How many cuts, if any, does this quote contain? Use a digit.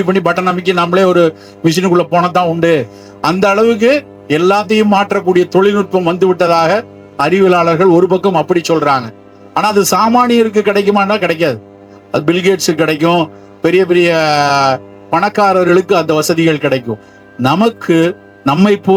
0